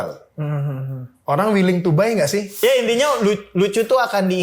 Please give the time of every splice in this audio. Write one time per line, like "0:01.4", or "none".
0:02.6